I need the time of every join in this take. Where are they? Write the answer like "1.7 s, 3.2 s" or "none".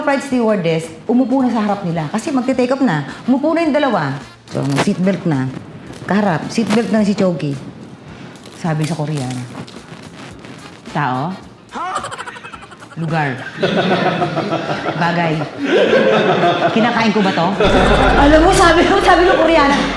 none